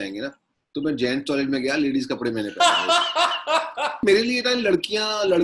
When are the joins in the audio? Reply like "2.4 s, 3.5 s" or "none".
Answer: 4.0 s

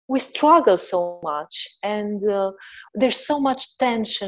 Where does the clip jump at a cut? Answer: 1.2 s

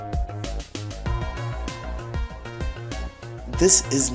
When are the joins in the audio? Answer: 1.7 s

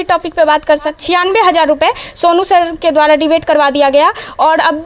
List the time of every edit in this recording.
0.9 s

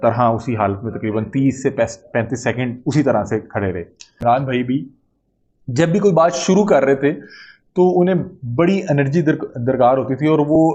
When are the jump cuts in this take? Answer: 4.1 s

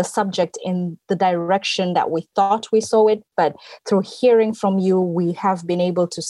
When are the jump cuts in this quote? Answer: none

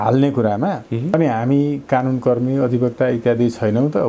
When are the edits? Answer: 1.1 s

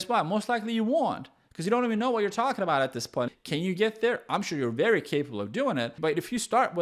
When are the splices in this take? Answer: 3.4 s, 5.9 s

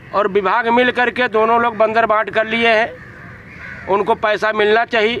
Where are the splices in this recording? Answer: none

